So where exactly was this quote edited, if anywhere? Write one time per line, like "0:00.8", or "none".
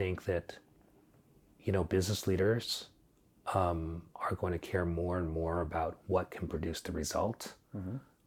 none